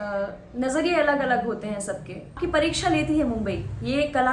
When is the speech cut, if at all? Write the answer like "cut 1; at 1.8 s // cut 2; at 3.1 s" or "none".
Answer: cut 1; at 2.4 s